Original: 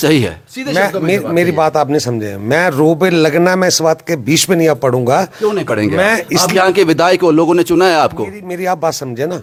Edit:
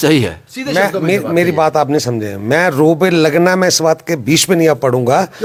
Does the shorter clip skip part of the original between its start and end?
no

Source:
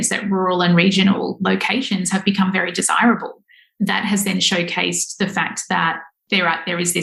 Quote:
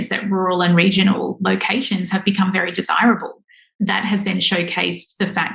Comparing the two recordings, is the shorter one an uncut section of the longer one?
yes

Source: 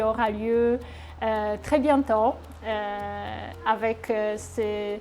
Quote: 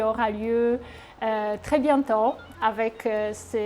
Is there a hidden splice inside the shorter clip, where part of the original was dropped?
yes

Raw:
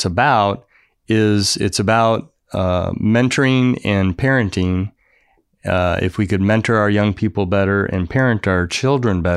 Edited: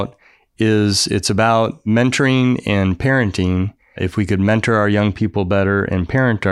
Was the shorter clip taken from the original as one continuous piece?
no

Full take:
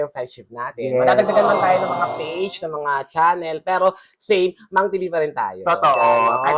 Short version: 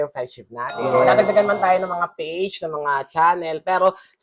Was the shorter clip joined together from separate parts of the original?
no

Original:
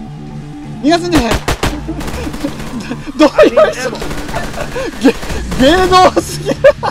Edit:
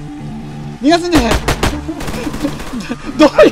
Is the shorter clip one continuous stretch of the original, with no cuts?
yes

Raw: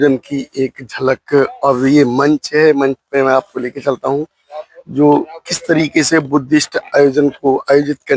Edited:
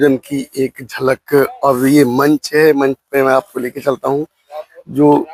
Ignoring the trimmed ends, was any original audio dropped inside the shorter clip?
no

